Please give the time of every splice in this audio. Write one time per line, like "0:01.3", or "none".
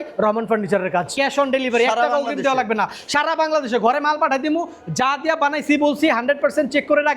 0:01.1